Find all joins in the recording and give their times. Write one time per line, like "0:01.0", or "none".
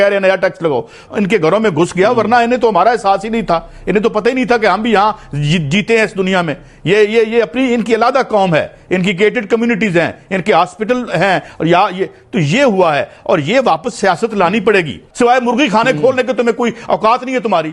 0:01.0
0:15.0